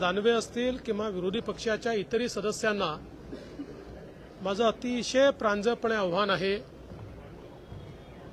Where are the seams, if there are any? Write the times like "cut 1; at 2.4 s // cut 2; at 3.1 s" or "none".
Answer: none